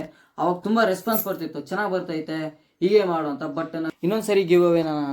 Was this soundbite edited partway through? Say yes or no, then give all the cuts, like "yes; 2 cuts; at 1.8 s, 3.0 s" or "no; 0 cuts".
yes; 1 cut; at 3.9 s